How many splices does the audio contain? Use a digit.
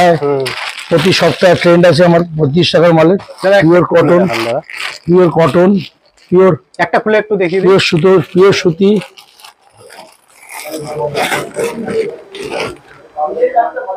0